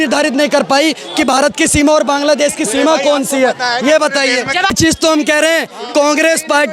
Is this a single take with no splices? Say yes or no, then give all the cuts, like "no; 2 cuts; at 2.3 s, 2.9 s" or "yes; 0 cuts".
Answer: no; 1 cut; at 4.7 s